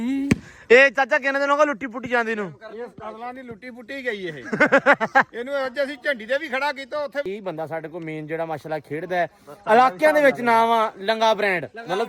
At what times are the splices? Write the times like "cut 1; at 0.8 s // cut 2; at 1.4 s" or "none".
cut 1; at 7.2 s

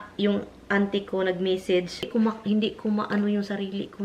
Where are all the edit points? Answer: cut 1; at 2.1 s

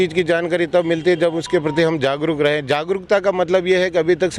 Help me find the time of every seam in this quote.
none

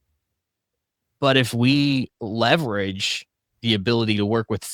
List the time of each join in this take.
cut 1; at 1.0 s

